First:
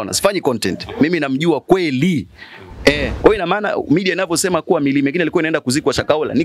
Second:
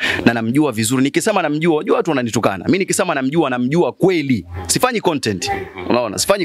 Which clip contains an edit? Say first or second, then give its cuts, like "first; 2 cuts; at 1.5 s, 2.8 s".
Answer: first; 1 cut; at 3.1 s